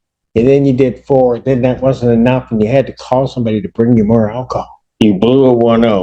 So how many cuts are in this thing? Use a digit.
1